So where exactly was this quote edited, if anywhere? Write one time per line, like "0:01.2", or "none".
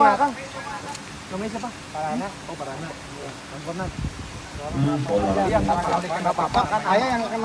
none